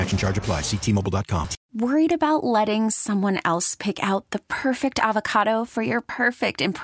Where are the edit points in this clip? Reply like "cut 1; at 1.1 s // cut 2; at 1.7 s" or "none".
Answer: cut 1; at 1.6 s